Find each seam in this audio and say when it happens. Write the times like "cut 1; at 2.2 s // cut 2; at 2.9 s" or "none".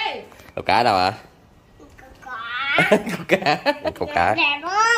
cut 1; at 3.9 s